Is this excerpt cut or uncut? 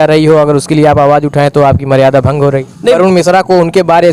cut